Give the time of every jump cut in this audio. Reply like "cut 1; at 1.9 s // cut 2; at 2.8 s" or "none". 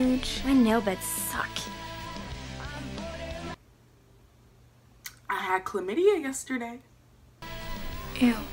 cut 1; at 3.5 s